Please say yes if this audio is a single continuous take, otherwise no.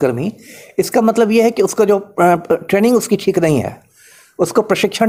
yes